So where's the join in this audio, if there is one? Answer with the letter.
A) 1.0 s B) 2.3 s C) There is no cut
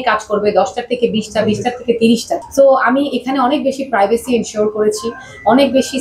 B